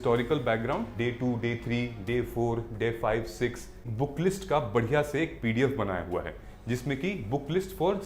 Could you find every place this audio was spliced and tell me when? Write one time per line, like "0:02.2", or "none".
0:00.9
0:03.8